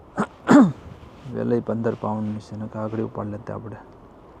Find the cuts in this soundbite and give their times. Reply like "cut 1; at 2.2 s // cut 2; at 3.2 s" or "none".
none